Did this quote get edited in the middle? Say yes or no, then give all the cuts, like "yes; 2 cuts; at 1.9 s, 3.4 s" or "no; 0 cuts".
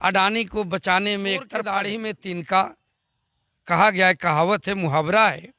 yes; 1 cut; at 1.8 s